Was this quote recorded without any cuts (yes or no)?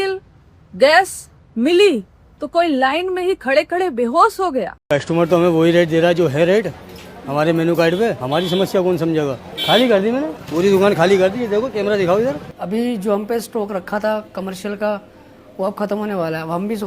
no